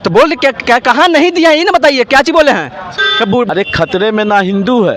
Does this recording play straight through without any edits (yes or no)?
no